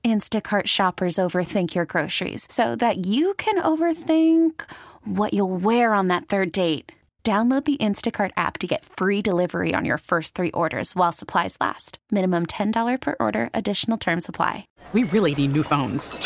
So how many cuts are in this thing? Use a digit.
1